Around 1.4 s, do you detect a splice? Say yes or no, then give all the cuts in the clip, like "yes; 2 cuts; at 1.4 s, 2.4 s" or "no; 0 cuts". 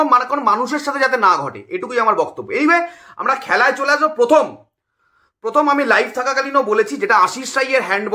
no; 0 cuts